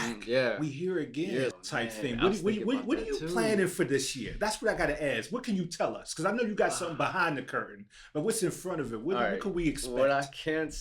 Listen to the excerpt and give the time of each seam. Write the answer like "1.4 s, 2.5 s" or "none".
1.5 s